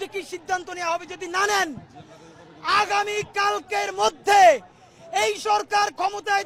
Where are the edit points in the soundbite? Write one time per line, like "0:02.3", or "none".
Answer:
none